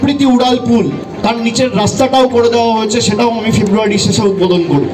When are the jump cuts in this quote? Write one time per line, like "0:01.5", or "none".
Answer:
0:01.1